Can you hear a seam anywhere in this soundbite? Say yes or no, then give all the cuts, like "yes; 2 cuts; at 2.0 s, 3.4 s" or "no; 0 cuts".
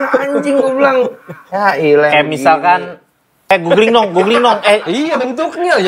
yes; 1 cut; at 3.4 s